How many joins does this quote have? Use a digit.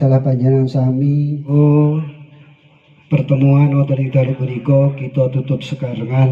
1